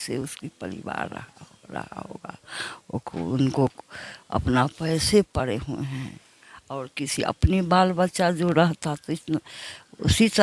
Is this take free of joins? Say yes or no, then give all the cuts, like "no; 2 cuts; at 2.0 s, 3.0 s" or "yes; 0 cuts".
yes; 0 cuts